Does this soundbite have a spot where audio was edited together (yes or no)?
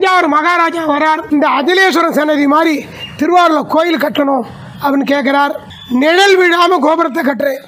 yes